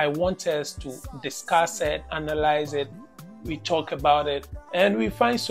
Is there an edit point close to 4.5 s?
yes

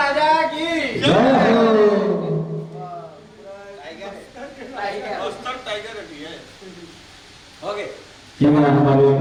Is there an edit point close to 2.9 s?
no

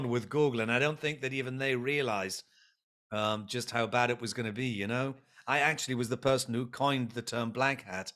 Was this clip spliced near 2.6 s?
no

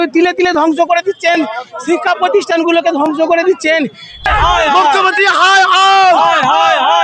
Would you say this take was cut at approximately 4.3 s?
yes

